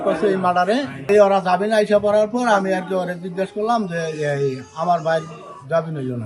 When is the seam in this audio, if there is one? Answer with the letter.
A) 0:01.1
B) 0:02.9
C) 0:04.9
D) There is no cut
A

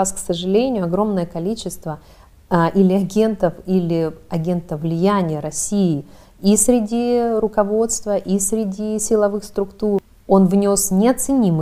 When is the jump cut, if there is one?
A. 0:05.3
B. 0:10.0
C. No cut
B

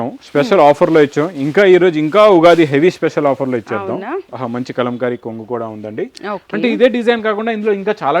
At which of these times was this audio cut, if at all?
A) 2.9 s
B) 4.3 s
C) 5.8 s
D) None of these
B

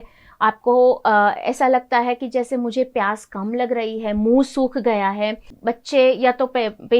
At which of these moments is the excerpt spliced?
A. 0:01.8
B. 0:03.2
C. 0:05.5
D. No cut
C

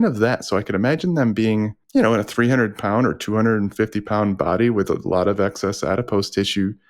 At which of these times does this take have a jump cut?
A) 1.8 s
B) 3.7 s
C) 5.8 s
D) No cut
A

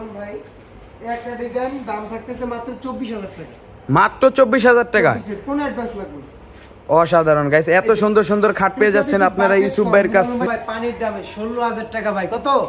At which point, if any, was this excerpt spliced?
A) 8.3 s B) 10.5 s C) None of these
B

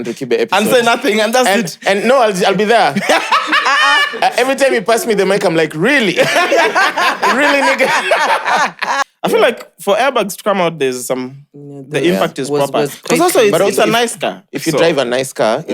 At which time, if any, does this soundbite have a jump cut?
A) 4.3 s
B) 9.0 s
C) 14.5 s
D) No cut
B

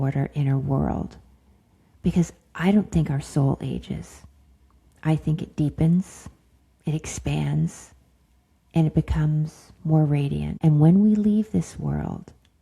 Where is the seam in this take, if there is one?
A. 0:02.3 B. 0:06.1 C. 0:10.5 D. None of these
C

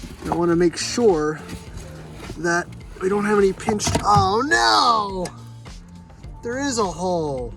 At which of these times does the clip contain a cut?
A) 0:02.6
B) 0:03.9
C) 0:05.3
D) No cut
D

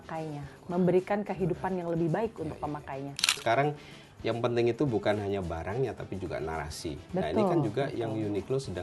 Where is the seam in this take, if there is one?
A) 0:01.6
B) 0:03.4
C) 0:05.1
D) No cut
B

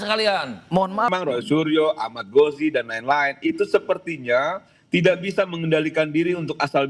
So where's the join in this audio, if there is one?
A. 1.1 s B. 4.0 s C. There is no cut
A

